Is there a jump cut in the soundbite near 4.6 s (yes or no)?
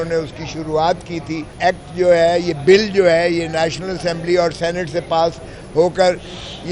no